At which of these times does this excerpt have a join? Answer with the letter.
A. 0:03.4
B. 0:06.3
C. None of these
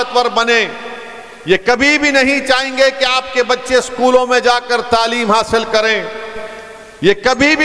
C